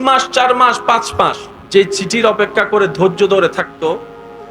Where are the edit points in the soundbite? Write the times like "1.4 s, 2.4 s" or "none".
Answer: 1.5 s